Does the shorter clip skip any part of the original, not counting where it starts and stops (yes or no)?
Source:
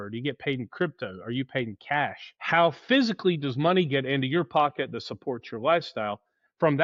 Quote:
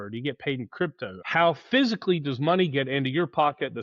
yes